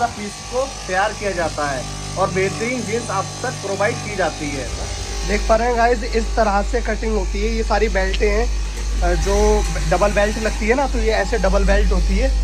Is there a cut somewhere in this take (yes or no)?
no